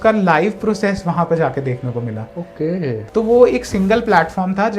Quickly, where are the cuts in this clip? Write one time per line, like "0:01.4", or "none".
0:03.0